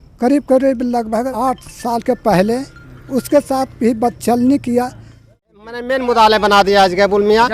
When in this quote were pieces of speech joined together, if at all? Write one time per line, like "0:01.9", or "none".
0:01.3
0:05.4